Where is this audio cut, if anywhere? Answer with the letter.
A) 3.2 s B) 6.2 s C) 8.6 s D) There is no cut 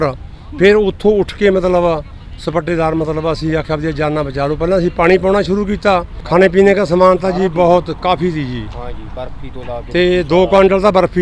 B